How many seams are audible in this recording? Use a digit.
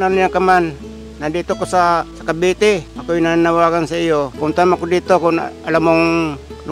3